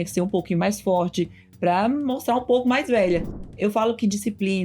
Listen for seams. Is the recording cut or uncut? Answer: cut